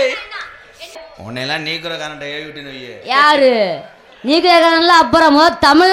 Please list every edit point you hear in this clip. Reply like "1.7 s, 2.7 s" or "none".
1.0 s